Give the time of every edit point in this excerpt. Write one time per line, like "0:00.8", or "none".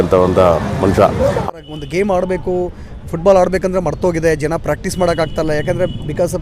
0:01.4